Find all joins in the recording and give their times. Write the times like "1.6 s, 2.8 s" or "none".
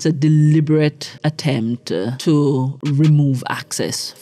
1.1 s, 2.2 s, 2.8 s